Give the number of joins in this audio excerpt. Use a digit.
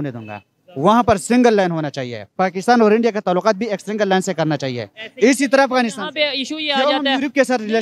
0